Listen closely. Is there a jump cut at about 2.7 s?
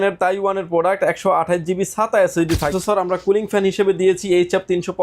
yes; 1 cut; at 2.7 s

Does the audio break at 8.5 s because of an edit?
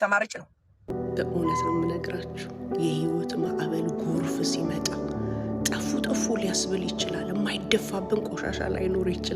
no; 1 cut; at 0.9 s

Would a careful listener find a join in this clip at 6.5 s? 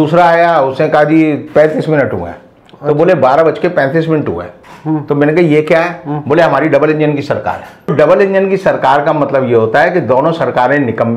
no; 1 cut; at 7.9 s

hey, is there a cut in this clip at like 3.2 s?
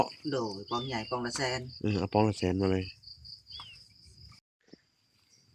no; 1 cut; at 4.4 s

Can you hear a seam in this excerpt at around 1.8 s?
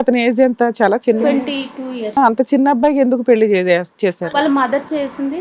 no; 0 cuts

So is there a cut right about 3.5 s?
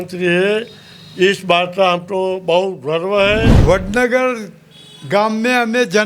yes; 1 cut; at 3.5 s

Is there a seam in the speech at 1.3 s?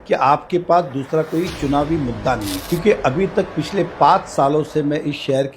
no; 1 cut; at 2.6 s

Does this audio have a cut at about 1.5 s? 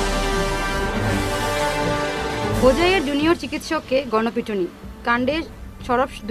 no; 0 cuts

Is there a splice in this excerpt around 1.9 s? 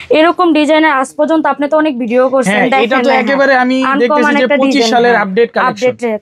no; 0 cuts

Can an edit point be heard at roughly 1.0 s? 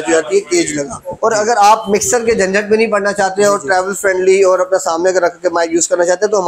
yes; 1 cut; at 1.0 s

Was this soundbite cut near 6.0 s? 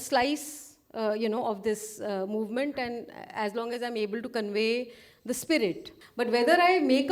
yes; 1 cut; at 6.0 s

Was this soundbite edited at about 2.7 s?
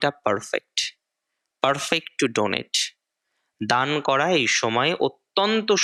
no; 0 cuts

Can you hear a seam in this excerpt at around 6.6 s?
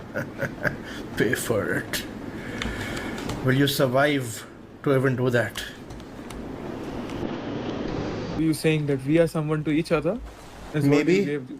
no; 1 cut; at 8.4 s

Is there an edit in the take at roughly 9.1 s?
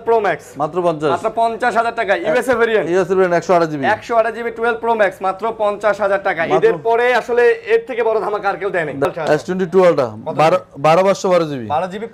yes; 1 cut; at 9.1 s

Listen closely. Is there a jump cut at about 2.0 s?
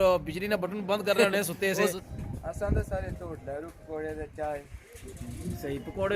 yes; 1 cut; at 2.0 s

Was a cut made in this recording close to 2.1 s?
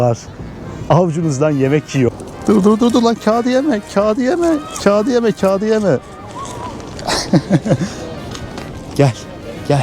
yes; 1 cut; at 2.1 s

